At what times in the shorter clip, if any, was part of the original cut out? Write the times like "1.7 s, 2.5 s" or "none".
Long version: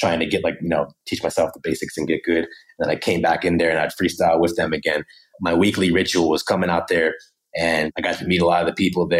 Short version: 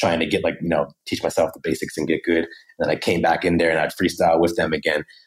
none